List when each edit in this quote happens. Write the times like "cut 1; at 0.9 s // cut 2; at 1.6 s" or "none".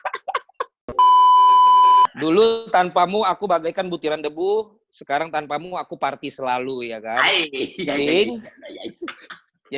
cut 1; at 0.8 s // cut 2; at 2.2 s